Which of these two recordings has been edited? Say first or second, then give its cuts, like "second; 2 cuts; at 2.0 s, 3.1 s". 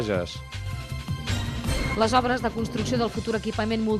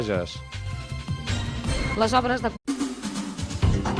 first; 1 cut; at 2.6 s